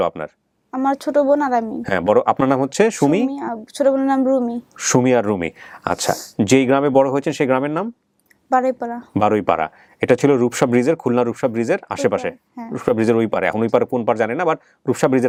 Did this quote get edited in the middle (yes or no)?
no